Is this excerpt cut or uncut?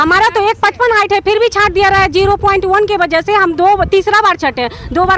uncut